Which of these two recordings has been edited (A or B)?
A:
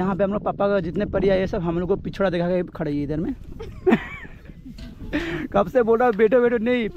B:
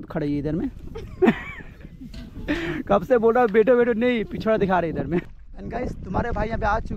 B